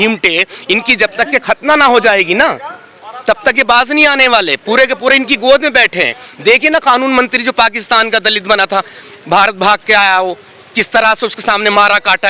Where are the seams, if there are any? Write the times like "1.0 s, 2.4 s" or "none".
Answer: none